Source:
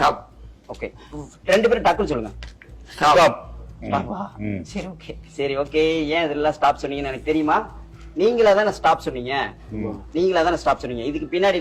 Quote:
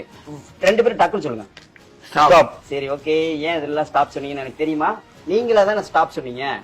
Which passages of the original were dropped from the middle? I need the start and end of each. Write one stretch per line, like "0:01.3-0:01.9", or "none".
0:03.5-0:05.3
0:07.8-0:08.0